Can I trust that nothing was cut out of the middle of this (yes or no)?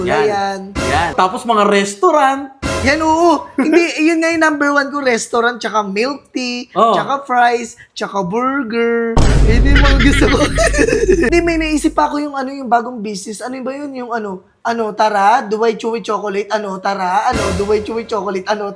no